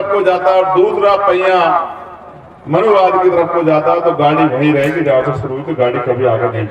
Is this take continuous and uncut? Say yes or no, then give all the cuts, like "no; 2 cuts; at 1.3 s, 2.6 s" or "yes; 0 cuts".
yes; 0 cuts